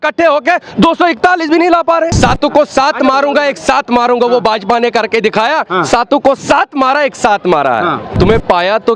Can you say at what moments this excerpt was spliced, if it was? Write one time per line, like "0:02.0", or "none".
0:02.1
0:08.0